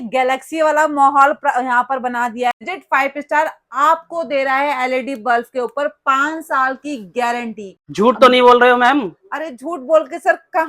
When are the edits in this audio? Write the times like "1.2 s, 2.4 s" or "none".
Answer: 2.5 s, 7.8 s